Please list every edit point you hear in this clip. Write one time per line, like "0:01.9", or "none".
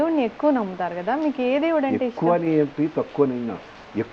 none